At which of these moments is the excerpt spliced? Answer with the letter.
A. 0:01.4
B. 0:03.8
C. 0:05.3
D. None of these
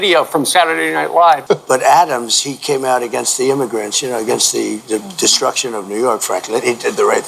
A